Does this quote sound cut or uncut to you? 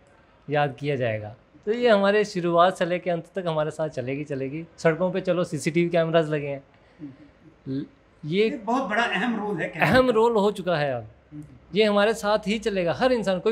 uncut